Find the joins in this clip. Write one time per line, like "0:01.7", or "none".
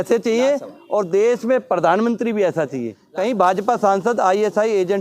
0:03.0